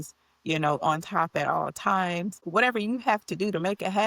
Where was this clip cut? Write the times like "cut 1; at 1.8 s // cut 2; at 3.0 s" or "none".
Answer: cut 1; at 2.4 s